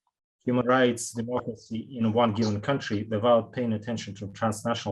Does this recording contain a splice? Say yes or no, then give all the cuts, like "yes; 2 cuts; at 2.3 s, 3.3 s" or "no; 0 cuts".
no; 0 cuts